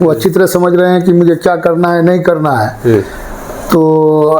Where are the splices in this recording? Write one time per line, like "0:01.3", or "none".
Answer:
none